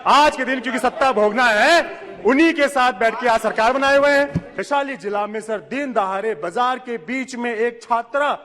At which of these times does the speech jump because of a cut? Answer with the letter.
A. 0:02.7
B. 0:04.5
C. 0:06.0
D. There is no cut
B